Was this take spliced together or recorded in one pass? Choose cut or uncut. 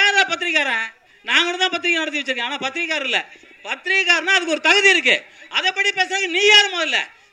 uncut